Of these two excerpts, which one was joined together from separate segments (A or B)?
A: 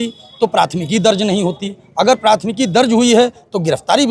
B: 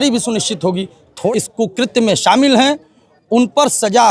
B